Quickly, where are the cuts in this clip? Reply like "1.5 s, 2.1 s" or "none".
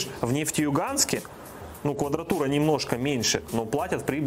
none